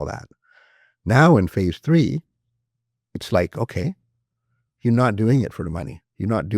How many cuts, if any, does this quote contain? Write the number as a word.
zero